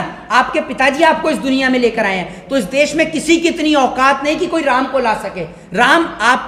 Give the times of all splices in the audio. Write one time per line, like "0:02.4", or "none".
none